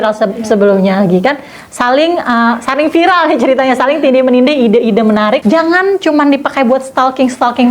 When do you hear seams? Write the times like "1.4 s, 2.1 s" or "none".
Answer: 5.4 s

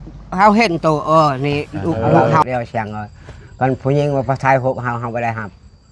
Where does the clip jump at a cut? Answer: 2.4 s

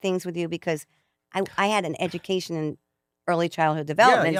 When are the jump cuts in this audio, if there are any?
none

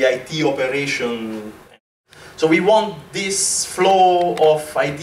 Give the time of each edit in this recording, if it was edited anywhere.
2.0 s

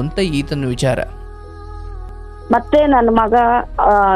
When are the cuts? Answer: 2.0 s

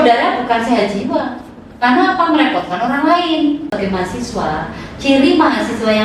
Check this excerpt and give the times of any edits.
3.7 s

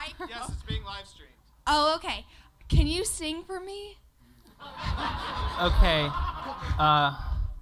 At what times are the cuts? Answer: none

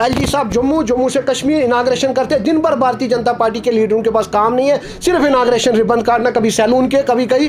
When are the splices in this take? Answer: none

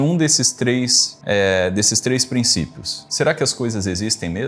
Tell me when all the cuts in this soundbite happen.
1.1 s, 3.0 s

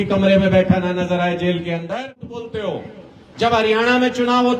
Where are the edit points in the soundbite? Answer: 2.4 s

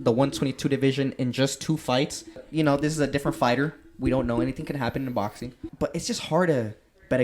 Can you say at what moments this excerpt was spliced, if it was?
2.4 s, 5.7 s

